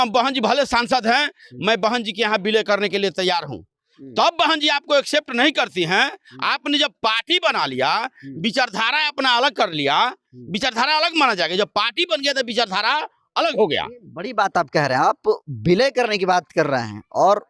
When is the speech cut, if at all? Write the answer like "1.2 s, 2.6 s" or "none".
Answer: none